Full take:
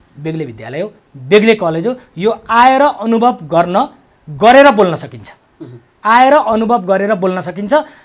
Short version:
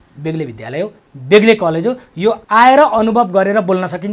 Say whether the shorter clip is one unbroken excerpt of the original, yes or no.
no